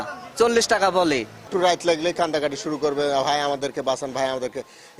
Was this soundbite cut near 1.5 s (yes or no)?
yes